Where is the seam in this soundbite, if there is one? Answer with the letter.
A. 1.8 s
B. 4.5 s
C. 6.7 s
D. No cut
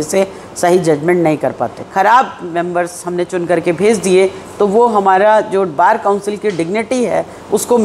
A